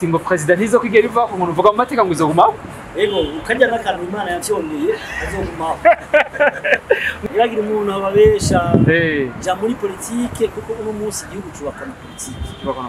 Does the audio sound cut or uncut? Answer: cut